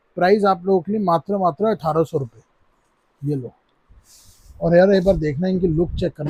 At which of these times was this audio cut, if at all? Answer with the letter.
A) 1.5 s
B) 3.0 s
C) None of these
C